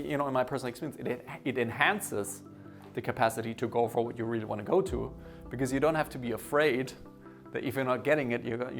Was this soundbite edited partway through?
no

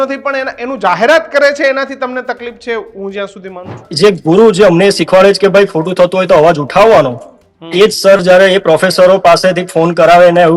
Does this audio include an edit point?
yes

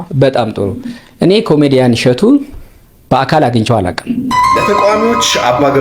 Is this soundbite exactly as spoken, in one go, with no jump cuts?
no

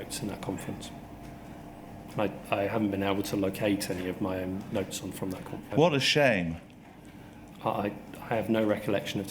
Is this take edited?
yes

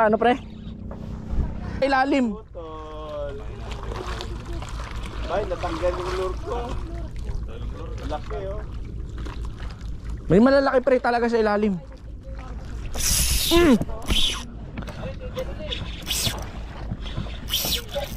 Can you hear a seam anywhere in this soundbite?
yes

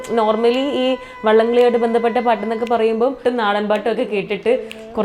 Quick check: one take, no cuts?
no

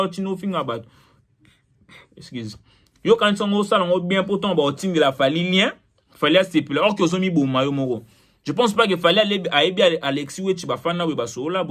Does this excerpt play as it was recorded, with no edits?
yes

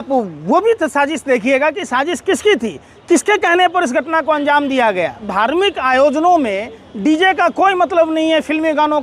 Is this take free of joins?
no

